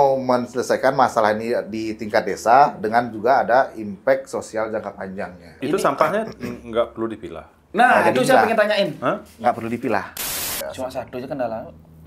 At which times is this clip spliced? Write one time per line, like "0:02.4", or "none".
0:05.5
0:10.2